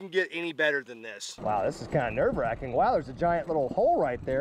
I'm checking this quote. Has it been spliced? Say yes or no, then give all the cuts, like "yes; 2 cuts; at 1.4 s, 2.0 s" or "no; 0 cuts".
yes; 1 cut; at 1.3 s